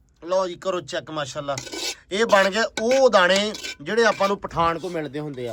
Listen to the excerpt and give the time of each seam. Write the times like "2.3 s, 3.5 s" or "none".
none